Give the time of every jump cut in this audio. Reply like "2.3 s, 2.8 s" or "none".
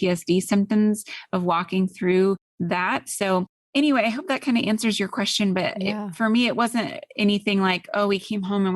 2.5 s

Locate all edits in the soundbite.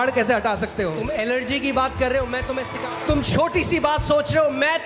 1.0 s, 2.7 s

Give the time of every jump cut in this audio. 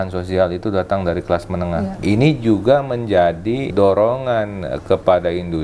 2.0 s, 3.7 s

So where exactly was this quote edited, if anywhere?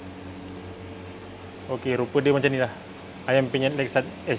none

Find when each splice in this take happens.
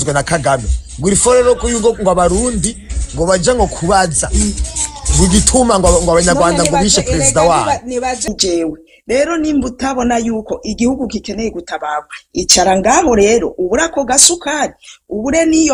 8.3 s

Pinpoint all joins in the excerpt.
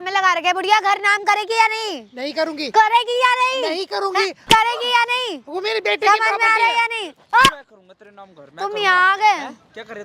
none

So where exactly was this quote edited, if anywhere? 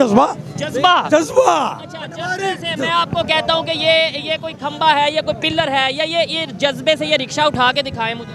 none

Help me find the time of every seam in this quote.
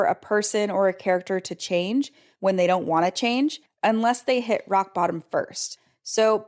none

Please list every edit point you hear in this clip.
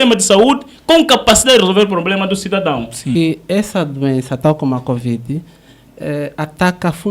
3.1 s

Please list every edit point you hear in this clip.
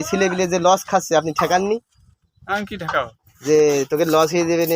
none

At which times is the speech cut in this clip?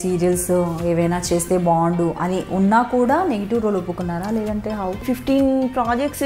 5.0 s

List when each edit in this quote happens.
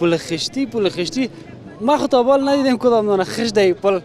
none

